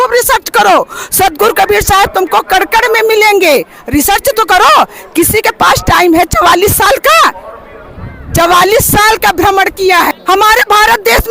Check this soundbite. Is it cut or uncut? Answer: cut